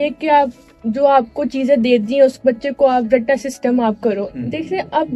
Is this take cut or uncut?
uncut